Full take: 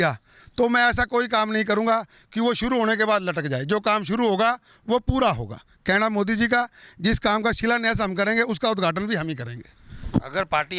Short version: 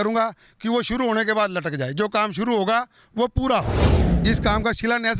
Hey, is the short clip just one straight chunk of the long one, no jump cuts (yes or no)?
no